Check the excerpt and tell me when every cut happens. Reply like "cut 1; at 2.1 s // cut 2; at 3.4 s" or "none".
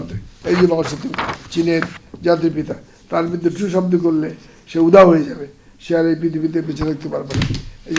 none